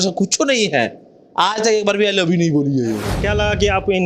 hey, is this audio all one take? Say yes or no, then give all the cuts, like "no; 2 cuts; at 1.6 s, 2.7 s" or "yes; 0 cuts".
no; 1 cut; at 3.1 s